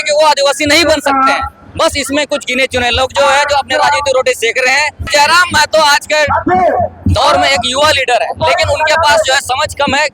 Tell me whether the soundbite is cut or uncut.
cut